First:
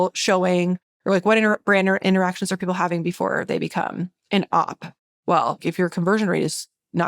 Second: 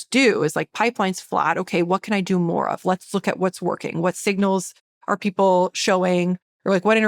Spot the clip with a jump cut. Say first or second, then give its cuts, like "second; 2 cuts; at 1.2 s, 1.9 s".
first; 2 cuts; at 4.1 s, 5.7 s